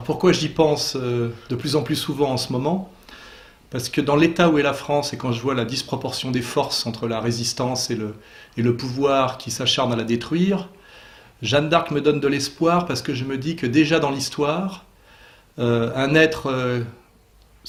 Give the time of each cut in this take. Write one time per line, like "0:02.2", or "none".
none